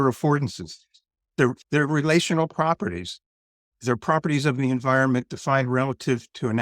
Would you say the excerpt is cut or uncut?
cut